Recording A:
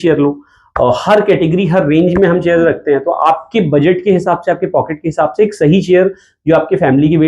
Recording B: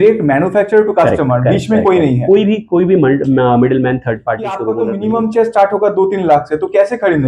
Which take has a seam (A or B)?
B